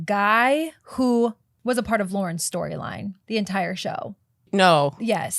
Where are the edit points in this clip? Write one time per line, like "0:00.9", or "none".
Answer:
0:01.5
0:04.4